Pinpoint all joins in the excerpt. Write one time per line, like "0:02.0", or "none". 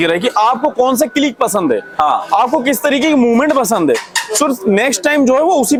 none